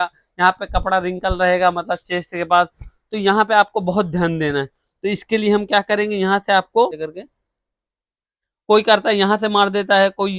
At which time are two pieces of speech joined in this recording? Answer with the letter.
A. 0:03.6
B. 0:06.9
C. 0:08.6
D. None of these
B